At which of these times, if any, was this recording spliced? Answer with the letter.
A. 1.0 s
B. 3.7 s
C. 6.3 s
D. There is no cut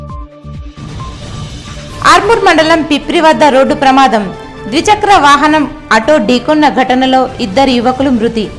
D